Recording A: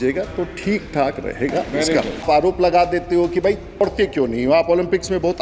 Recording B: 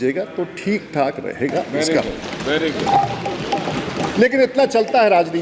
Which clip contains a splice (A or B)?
A